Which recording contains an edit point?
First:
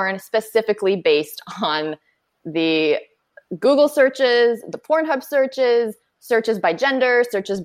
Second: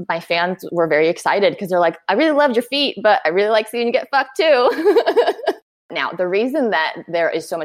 second; 1 cut; at 6.0 s

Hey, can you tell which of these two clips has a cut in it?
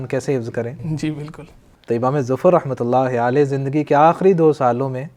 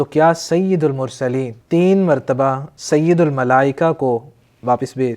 second; 2 cuts; at 1.5 s, 2.7 s

